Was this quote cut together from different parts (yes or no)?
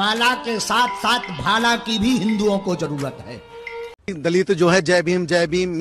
yes